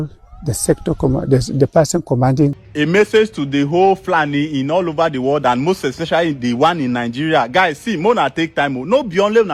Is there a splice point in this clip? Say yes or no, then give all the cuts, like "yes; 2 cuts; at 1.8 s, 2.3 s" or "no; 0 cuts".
yes; 1 cut; at 2.6 s